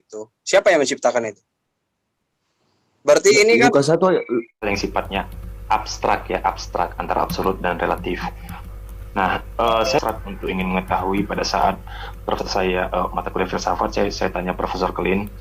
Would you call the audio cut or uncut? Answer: cut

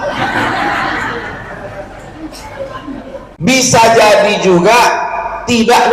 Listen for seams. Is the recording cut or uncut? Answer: cut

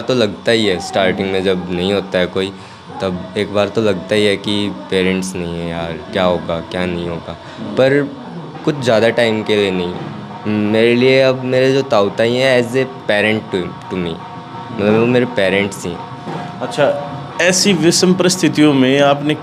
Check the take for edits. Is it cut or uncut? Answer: uncut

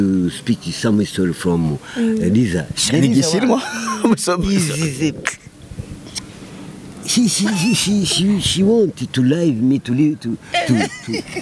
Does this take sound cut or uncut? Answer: uncut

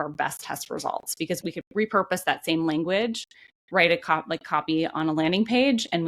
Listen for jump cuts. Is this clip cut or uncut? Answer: cut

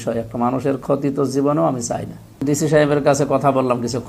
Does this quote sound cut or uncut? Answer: cut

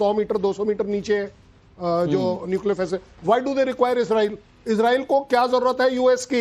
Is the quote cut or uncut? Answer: cut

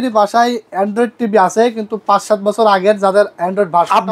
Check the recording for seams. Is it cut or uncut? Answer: uncut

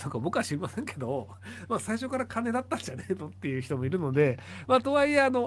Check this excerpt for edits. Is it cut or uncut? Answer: uncut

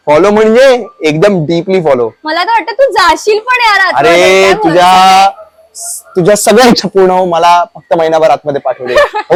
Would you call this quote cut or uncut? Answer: uncut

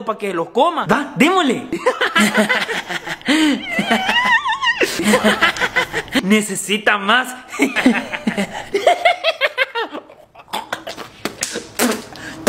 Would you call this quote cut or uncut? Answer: uncut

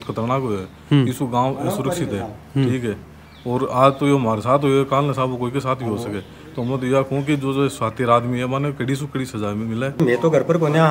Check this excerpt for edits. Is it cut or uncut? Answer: cut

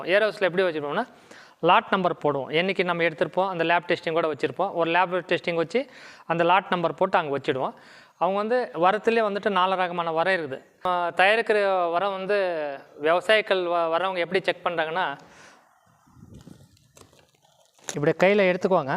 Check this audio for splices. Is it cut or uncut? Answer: cut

